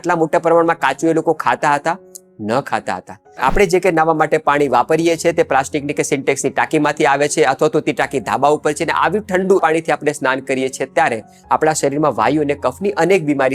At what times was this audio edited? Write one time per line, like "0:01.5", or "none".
0:03.3
0:09.6